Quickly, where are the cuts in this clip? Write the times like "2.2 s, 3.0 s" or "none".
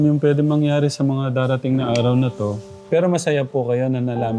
2.7 s